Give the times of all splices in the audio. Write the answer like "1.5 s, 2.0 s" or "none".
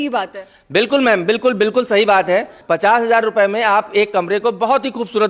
none